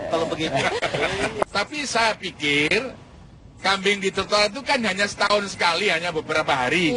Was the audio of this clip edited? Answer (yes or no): yes